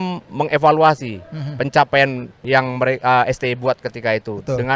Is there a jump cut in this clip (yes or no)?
yes